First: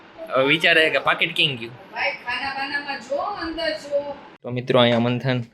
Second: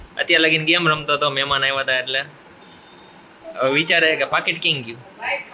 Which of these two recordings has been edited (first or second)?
first